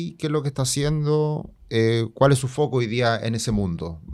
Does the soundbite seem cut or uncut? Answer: uncut